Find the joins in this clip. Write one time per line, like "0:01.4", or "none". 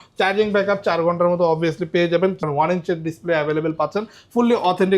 0:02.4